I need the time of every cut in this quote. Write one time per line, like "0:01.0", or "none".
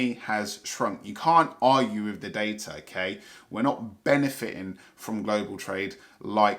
none